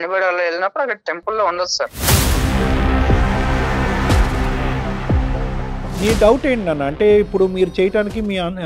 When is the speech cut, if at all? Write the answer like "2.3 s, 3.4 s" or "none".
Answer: 2.0 s, 6.0 s